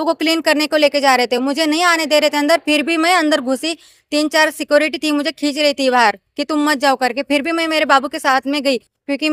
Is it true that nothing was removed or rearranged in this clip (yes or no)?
yes